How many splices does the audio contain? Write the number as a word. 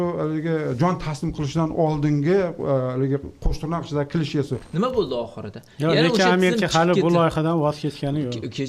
one